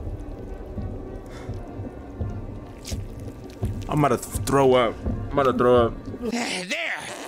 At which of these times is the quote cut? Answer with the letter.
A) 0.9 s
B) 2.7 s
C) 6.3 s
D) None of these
C